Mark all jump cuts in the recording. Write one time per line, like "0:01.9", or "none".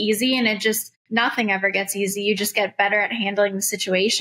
0:00.9

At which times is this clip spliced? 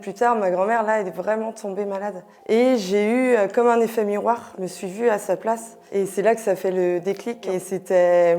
0:02.3
0:04.6
0:07.3

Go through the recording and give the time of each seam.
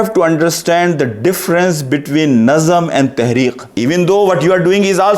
0:03.7

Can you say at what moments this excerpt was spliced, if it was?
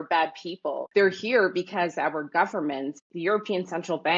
0:00.8
0:03.0

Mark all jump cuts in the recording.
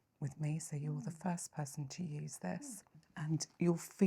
0:03.0

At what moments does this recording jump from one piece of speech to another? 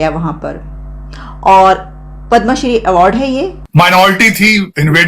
0:03.6

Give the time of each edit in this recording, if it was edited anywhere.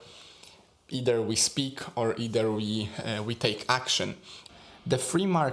0:04.4

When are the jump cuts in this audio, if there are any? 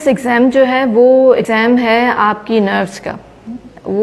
0:01.4

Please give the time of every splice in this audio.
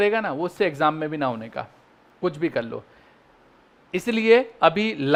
none

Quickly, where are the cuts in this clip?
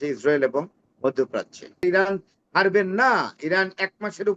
0:01.8

